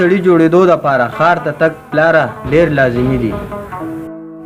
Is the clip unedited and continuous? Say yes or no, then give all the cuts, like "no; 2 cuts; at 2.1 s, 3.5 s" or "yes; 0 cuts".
yes; 0 cuts